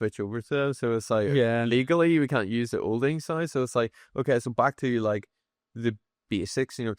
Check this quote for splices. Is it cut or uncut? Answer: uncut